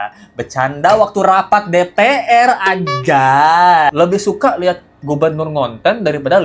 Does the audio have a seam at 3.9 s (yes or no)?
yes